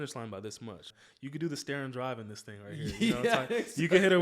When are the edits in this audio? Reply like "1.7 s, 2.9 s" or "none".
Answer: 0.9 s